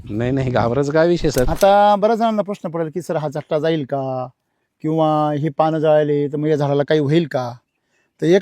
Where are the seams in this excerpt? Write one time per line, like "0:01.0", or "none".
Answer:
0:01.5